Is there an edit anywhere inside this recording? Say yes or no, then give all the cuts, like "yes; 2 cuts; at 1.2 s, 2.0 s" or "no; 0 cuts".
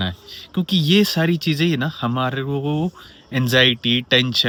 no; 0 cuts